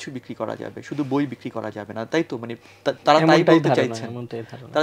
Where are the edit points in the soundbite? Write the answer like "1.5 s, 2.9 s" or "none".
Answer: none